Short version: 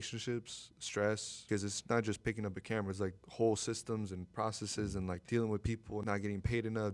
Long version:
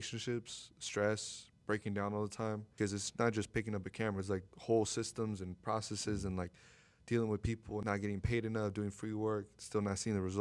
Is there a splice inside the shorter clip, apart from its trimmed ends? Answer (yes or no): yes